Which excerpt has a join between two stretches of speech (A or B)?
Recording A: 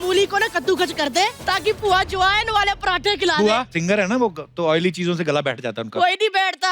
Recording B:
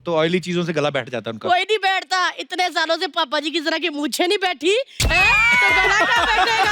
A